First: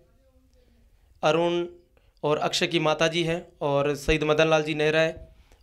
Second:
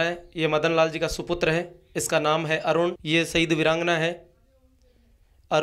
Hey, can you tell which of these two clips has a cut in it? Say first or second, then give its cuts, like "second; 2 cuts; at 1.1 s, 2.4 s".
second; 1 cut; at 3.0 s